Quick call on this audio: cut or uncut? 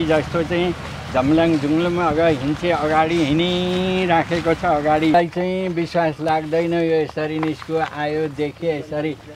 cut